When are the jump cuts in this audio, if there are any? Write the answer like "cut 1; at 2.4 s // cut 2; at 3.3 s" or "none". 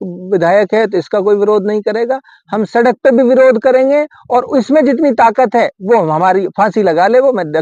none